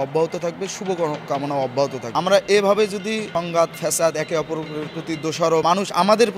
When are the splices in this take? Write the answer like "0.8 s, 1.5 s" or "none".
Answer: 2.0 s, 3.3 s, 5.6 s